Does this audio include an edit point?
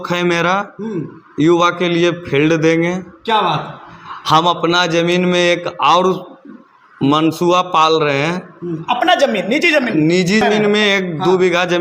yes; 1 cut; at 10.4 s

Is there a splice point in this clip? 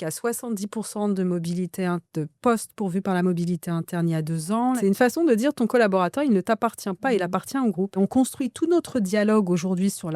yes; 2 cuts; at 4.8 s, 8.0 s

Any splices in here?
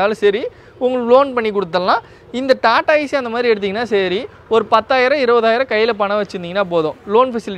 no; 0 cuts

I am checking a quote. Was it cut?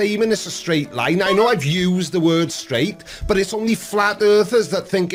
no; 0 cuts

